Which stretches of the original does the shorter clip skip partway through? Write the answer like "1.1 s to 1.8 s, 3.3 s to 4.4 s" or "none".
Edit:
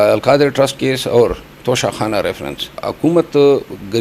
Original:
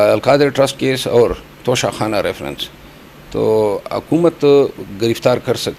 2.8 s to 3.8 s